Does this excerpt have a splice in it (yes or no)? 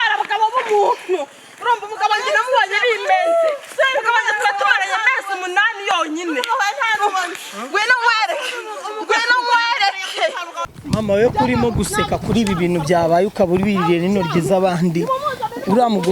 yes